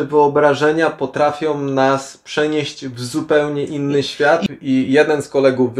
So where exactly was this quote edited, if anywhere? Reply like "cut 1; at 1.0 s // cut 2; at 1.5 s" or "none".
cut 1; at 4.5 s